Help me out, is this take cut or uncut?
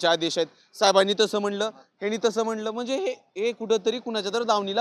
uncut